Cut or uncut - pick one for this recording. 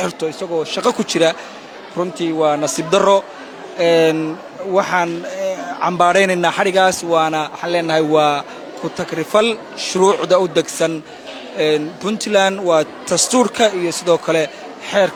uncut